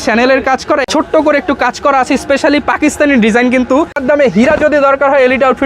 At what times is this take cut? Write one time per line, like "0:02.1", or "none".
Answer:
0:00.8
0:04.0